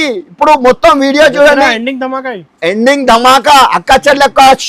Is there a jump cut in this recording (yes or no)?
no